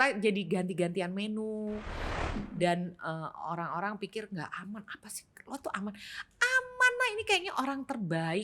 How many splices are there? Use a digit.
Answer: 1